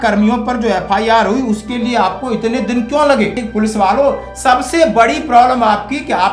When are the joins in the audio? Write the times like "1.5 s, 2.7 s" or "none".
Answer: 3.4 s